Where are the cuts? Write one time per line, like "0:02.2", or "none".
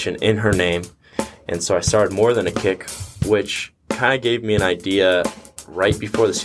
0:01.1

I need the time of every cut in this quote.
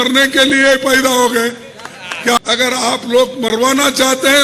0:02.4

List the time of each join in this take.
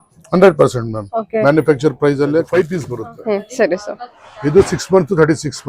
0:02.5

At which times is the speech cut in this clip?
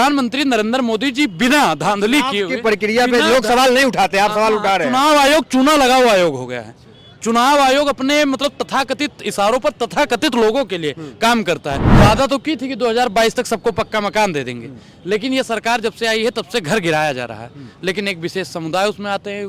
0:11.8

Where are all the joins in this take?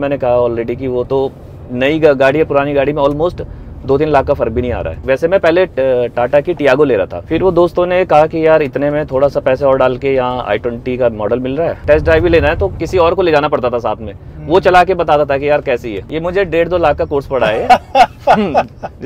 0:04.9
0:11.8
0:16.1

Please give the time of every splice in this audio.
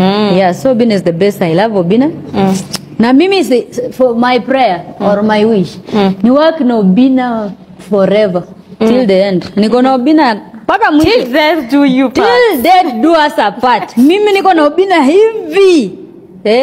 0:09.7

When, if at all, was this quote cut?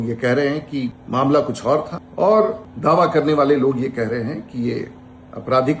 0:01.0
0:02.0
0:02.7

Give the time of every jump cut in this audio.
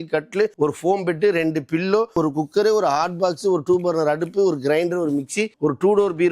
0:02.1

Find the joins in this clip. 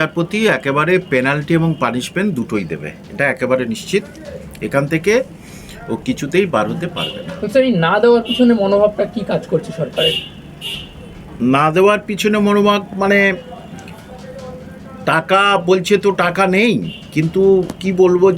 none

